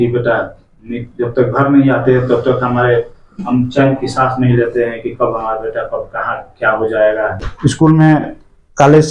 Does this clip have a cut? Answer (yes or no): yes